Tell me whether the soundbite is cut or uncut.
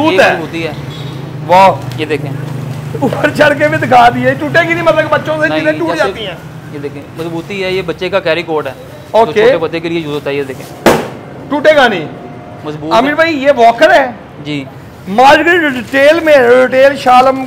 uncut